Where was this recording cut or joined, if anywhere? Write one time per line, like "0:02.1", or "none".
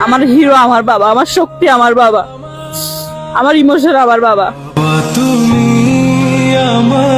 0:04.5